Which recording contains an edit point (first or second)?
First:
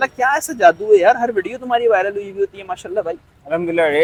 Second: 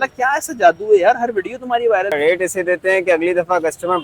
second